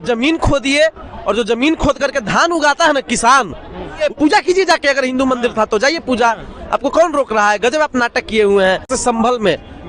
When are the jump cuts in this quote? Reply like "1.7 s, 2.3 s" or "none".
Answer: 4.0 s, 8.9 s